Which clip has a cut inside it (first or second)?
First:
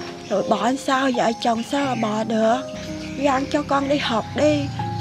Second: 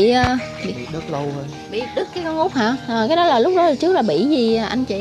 first